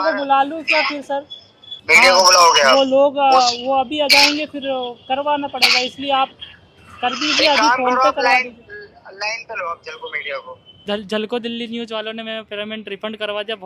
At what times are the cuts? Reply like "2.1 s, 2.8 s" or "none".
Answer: 1.7 s, 10.8 s